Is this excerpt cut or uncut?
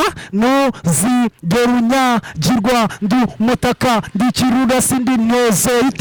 uncut